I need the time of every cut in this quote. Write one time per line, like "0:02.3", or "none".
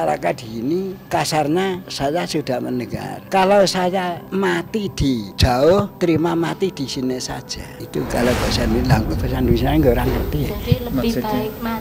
0:01.0
0:01.9
0:03.1
0:04.2
0:05.3
0:05.9
0:07.7